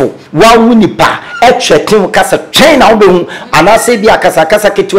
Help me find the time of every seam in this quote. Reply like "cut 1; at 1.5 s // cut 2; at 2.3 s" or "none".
none